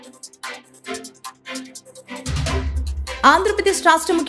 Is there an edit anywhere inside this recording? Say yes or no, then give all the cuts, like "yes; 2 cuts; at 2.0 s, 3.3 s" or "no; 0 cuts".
yes; 1 cut; at 3.2 s